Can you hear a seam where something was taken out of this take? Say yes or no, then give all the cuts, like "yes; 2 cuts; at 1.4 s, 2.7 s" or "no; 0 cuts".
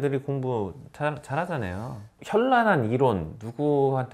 yes; 1 cut; at 2.2 s